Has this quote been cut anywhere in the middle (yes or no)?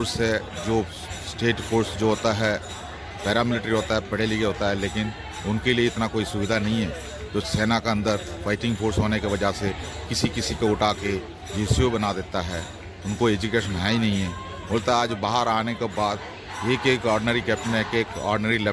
no